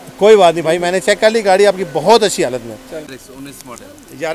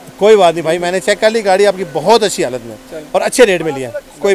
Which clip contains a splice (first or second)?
first